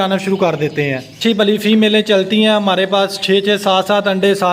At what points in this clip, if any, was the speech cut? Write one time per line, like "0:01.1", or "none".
0:01.1